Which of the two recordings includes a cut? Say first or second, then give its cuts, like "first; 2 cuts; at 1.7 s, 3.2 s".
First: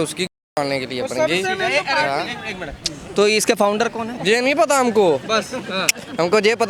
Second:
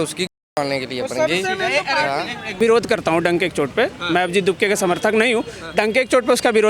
second; 1 cut; at 2.5 s